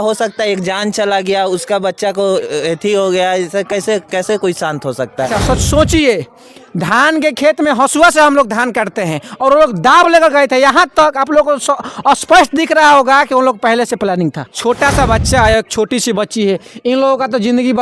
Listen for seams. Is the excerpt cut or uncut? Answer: cut